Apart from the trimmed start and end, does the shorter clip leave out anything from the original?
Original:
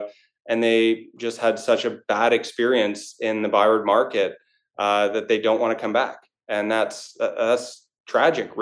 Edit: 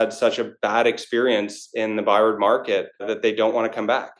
yes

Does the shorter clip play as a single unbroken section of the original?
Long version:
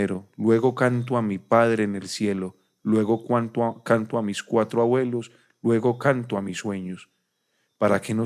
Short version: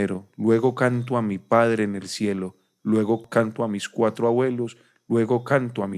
no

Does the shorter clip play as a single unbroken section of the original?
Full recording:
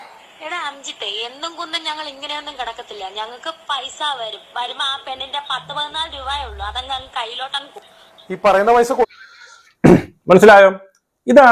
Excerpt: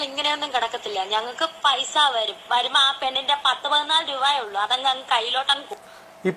yes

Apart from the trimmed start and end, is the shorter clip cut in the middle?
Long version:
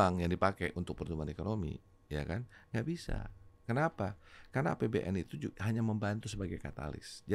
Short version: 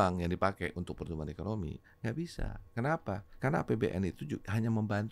yes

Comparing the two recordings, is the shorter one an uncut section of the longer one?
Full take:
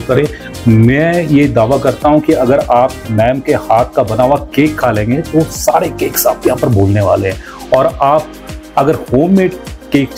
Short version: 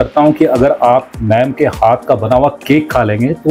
yes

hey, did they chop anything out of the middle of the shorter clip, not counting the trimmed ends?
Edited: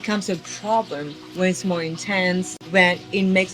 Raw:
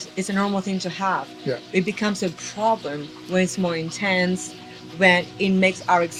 yes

